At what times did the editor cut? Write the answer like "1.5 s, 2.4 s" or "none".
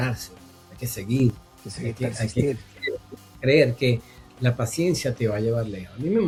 none